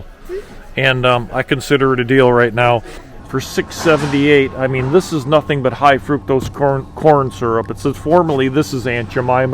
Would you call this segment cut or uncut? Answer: cut